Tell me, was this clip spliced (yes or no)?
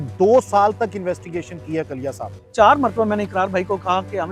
yes